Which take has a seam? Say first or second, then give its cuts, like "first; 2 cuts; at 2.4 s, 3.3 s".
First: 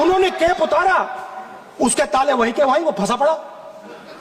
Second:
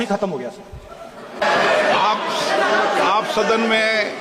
second; 1 cut; at 1.4 s